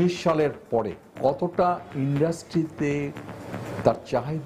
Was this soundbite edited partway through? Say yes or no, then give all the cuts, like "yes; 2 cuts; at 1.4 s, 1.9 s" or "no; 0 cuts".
yes; 1 cut; at 1.0 s